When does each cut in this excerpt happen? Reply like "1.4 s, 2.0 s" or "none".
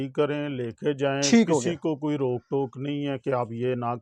none